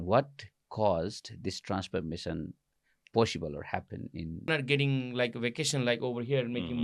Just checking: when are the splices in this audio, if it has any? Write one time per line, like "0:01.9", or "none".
0:04.5